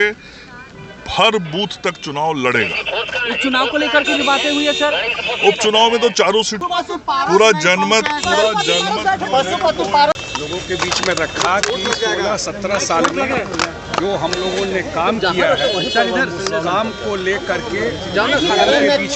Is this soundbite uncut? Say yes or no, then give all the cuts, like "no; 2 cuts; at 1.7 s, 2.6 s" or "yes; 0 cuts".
yes; 0 cuts